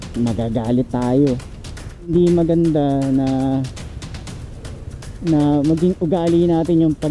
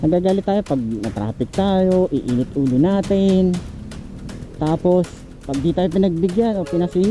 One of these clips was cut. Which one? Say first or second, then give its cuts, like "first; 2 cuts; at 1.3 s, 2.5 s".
first; 1 cut; at 2.1 s